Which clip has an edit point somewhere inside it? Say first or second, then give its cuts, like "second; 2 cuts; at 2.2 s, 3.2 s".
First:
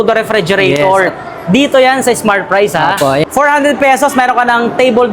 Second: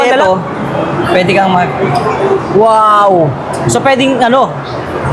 first; 1 cut; at 3.2 s